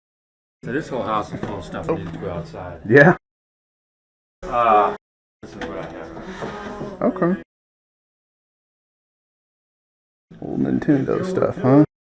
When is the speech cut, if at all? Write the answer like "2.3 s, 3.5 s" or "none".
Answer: none